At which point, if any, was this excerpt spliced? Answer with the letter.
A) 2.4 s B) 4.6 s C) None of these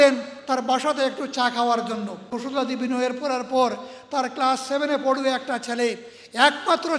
A